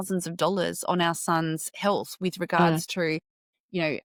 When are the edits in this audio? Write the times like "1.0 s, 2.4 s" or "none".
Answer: none